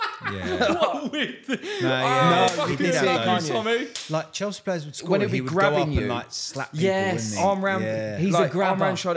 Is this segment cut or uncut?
uncut